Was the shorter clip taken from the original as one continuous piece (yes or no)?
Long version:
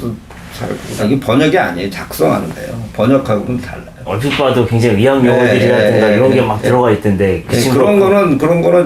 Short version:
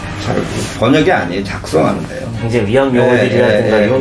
no